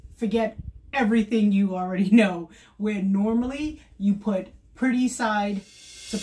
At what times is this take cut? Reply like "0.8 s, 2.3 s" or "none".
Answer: none